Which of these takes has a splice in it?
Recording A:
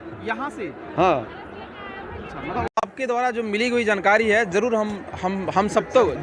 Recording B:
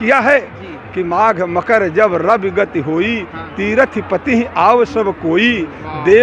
A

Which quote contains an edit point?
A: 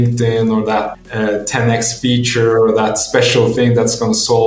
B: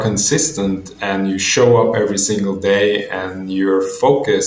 A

